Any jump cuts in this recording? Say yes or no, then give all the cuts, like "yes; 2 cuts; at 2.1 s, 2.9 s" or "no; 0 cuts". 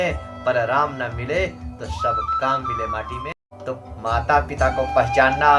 yes; 1 cut; at 3.3 s